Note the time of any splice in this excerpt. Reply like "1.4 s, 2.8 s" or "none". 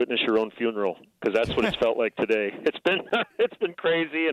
none